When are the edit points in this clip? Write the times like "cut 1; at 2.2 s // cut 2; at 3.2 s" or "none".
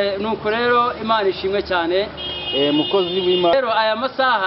cut 1; at 3.5 s